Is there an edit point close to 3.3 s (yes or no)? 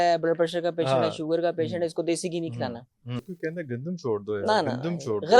yes